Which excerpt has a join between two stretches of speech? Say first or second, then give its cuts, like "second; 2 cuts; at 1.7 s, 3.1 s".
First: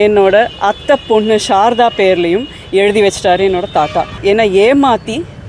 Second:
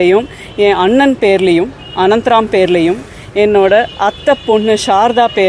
first; 1 cut; at 4.1 s